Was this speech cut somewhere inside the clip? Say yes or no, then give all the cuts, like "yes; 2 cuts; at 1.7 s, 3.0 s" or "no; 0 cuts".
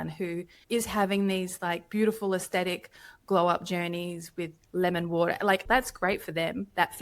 yes; 2 cuts; at 4.6 s, 5.6 s